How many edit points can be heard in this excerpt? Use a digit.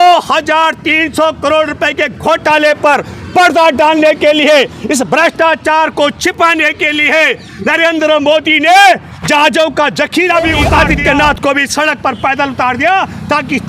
1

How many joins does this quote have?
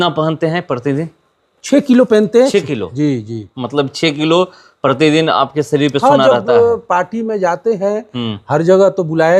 0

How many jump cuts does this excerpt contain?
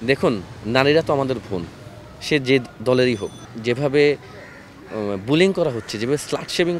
1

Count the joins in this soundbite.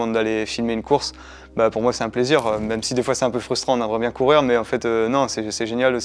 0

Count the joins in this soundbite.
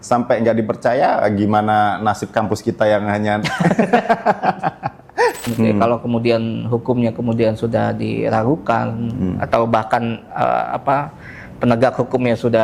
1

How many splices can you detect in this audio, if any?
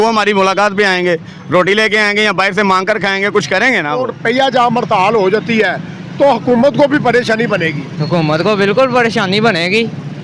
1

